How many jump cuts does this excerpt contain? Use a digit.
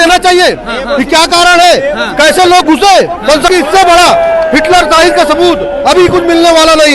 1